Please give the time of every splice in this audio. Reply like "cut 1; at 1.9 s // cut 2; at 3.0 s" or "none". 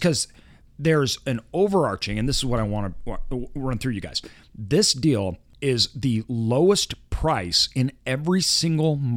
cut 1; at 5.5 s